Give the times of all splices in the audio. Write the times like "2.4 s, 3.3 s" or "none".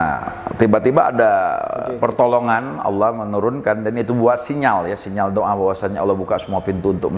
none